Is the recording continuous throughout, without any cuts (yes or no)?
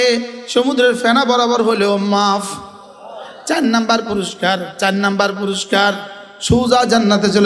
yes